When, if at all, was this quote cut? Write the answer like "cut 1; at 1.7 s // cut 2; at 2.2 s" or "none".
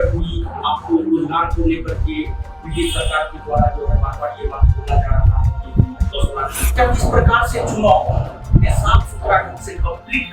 cut 1; at 6.7 s